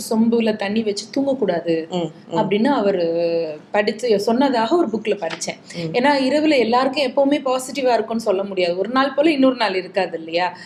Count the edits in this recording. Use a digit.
0